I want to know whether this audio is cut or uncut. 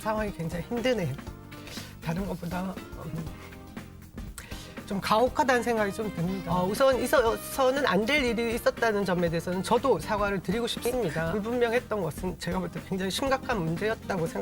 cut